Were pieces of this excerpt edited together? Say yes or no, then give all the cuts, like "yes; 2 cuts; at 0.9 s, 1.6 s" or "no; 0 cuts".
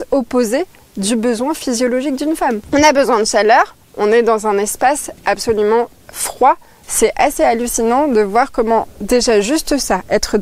yes; 2 cuts; at 2.6 s, 6.8 s